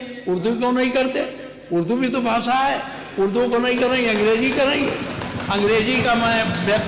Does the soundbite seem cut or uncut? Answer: uncut